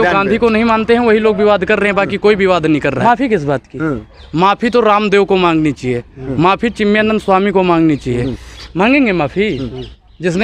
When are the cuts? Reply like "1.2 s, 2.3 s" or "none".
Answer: 3.0 s

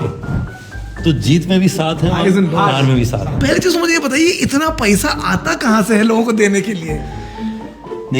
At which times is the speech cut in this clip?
3.3 s

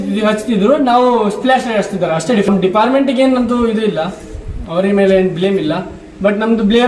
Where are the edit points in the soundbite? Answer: 2.5 s

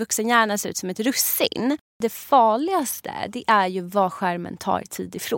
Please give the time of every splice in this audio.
1.9 s

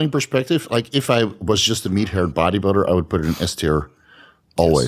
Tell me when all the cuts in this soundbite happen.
none

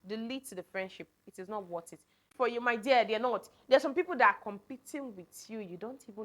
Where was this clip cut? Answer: 2.3 s

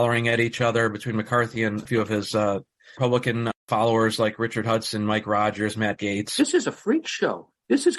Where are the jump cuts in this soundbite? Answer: 6.3 s

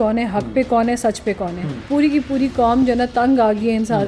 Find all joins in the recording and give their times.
1.7 s

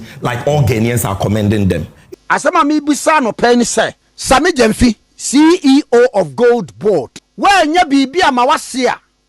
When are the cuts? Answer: 1.9 s, 4.1 s, 7.2 s

